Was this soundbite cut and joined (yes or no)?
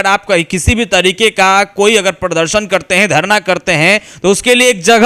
no